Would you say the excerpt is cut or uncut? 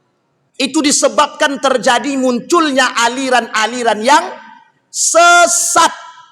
uncut